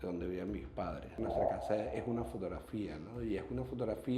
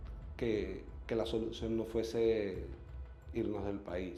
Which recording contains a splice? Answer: first; 1 cut; at 1.1 s

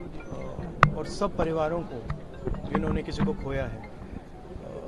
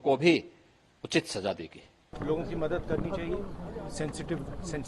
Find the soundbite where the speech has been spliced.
second; 1 cut; at 2.1 s

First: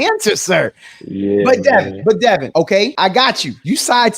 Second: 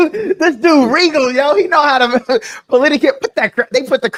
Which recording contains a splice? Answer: first; 1 cut; at 2.6 s

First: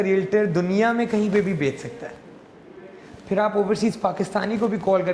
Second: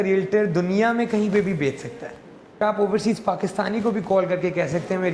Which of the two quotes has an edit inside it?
second; 1 cut; at 2.6 s

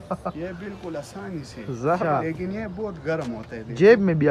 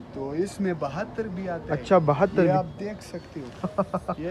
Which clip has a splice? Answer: first; 1 cut; at 2.0 s

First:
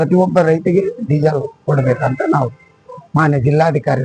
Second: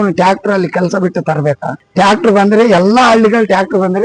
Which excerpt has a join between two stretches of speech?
second; 1 cut; at 1.8 s

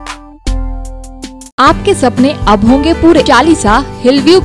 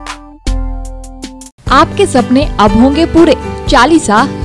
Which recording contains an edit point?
first; 2 cuts; at 1.5 s, 3.3 s

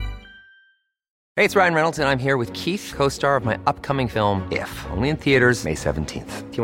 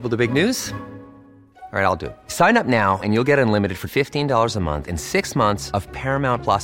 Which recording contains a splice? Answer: first; 1 cut; at 1.1 s

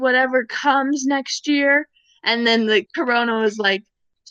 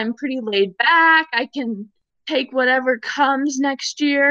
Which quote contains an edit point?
first; 1 cut; at 2.9 s

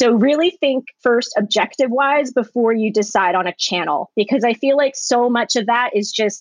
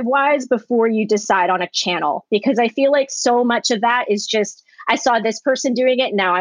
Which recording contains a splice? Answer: first; 1 cut; at 0.9 s

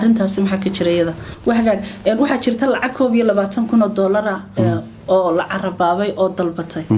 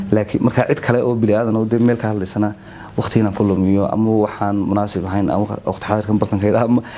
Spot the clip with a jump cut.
first; 1 cut; at 1.3 s

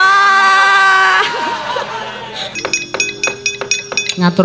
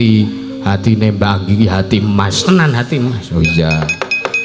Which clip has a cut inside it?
first; 1 cut; at 2.4 s

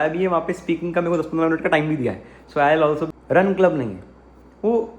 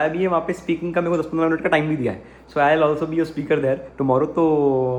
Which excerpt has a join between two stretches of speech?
first; 1 cut; at 3.1 s

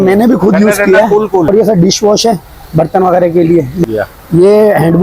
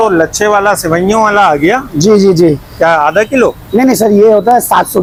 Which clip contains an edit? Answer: first; 2 cuts; at 1.5 s, 3.9 s

